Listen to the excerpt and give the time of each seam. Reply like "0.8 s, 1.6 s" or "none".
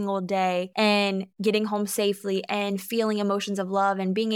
1.1 s